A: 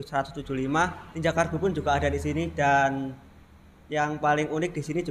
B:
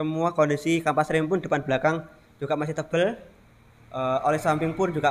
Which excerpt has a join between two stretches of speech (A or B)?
A